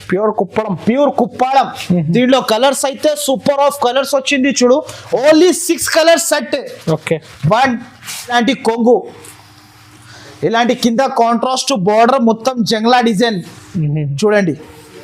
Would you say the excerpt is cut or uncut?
cut